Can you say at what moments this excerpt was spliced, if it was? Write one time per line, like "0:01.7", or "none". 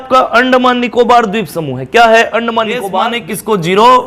0:02.9